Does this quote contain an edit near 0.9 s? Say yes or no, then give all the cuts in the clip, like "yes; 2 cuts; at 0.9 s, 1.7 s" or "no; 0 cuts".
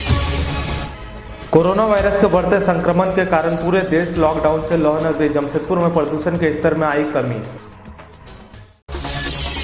yes; 1 cut; at 0.9 s